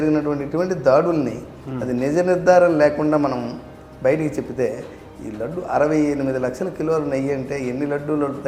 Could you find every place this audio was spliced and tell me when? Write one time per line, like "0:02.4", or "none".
none